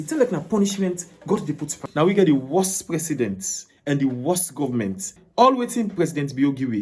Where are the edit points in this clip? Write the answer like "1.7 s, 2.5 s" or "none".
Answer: 1.8 s, 5.2 s